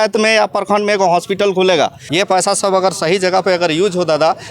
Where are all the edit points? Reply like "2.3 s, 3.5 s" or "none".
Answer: 2.0 s